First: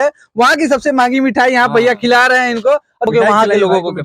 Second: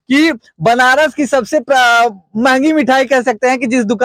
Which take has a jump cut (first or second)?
first